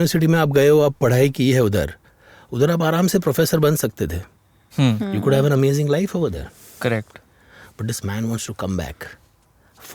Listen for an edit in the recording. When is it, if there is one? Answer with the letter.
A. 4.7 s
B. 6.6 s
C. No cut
C